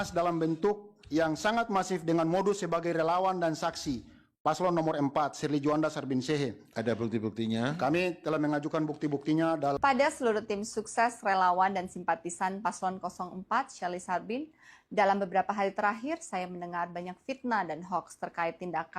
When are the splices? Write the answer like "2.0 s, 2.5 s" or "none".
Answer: 9.8 s